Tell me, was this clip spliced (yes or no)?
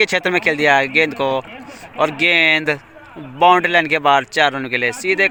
no